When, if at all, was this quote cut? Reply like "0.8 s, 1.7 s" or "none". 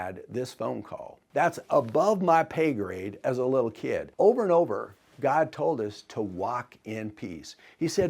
1.2 s, 4.1 s